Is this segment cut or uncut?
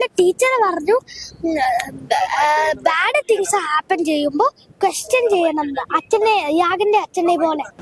uncut